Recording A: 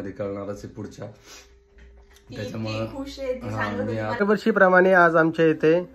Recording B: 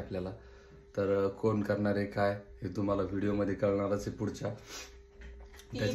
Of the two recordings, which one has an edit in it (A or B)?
A